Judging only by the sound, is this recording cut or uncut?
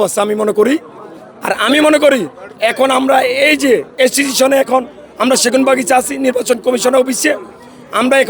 uncut